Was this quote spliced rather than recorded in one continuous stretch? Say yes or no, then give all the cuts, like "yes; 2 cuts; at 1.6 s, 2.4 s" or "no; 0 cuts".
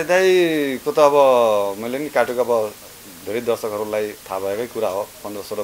no; 0 cuts